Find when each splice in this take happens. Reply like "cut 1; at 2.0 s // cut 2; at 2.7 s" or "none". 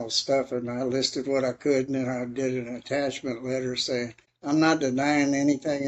cut 1; at 4.2 s

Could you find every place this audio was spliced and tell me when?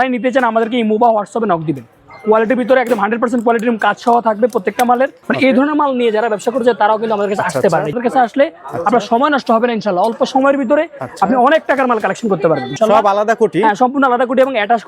cut 1; at 5.2 s // cut 2; at 7.9 s // cut 3; at 12.7 s

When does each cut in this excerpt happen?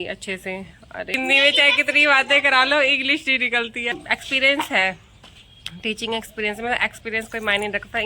cut 1; at 1.1 s // cut 2; at 3.9 s

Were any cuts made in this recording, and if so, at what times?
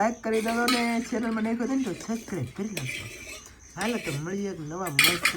none

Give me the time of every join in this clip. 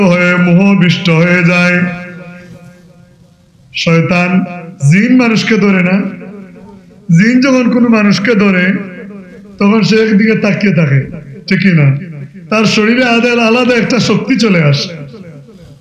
none

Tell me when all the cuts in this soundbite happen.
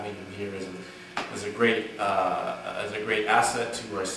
cut 1; at 3.2 s

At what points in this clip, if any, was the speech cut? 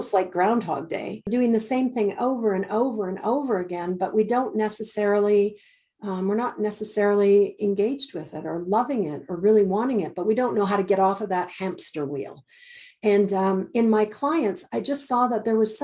cut 1; at 1.3 s

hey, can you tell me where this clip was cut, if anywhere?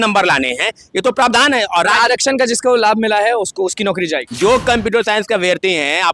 cut 1; at 4.3 s

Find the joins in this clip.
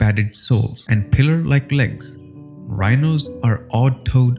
none

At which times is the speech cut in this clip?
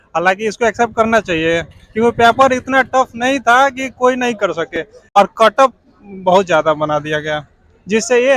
cut 1; at 5.1 s

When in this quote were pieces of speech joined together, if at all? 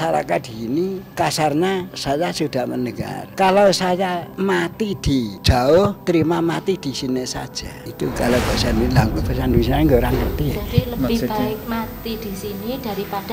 cut 1; at 1.0 s // cut 2; at 1.9 s // cut 3; at 3.2 s // cut 4; at 4.3 s // cut 5; at 5.4 s // cut 6; at 6.0 s // cut 7; at 7.8 s

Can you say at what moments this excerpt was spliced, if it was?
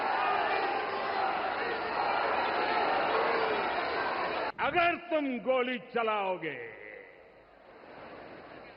cut 1; at 4.5 s

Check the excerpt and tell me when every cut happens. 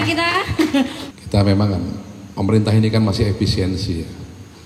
cut 1; at 1.0 s

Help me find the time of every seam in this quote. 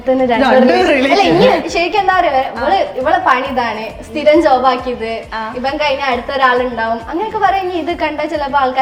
none

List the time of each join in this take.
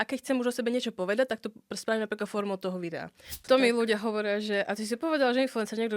cut 1; at 3.3 s

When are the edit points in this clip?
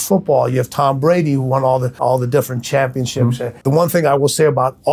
cut 1; at 2.0 s // cut 2; at 3.5 s

